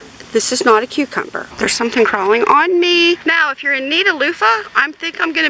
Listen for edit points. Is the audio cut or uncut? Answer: cut